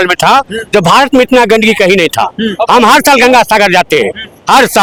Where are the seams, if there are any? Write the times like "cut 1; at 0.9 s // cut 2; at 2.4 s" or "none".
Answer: none